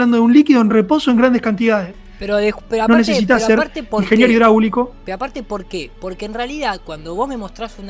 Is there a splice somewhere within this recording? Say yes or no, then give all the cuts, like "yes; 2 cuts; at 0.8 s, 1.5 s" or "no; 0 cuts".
no; 0 cuts